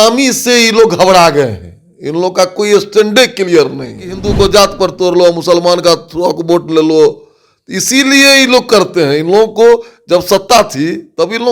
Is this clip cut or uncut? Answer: cut